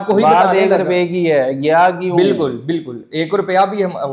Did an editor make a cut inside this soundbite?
no; 0 cuts

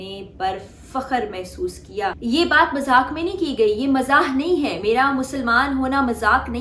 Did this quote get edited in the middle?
yes; 1 cut; at 2.2 s

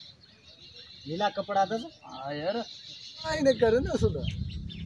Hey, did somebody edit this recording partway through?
yes; 1 cut; at 3.3 s

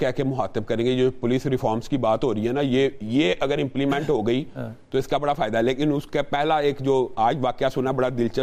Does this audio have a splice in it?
no; 0 cuts

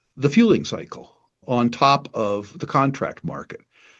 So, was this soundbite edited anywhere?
yes; 1 cut; at 1.4 s

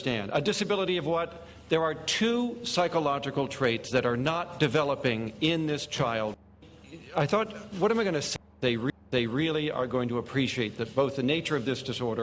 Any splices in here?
no; 0 cuts

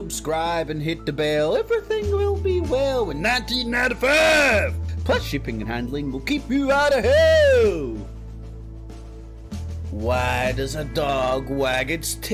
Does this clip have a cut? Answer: no; 0 cuts

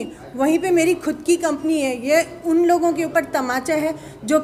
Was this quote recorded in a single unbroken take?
yes; 0 cuts

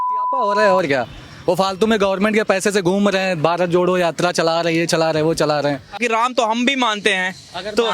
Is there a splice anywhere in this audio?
yes; 1 cut; at 6.0 s

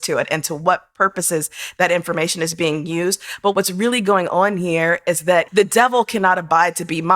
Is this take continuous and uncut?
no; 2 cuts; at 3.5 s, 5.5 s

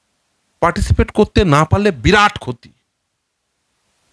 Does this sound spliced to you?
no; 0 cuts

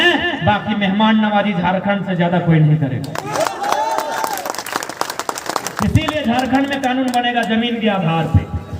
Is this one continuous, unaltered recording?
yes; 0 cuts

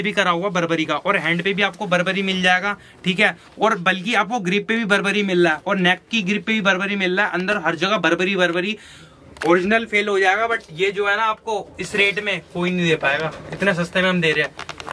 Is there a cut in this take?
no; 0 cuts

